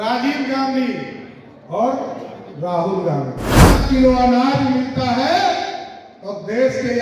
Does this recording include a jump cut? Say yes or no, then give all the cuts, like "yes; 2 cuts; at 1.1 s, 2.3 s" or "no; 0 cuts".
yes; 1 cut; at 3.7 s